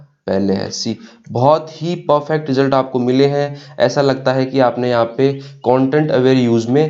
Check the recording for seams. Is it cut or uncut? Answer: uncut